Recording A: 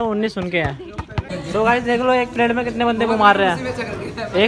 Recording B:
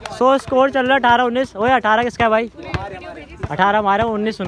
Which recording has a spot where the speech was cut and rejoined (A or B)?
A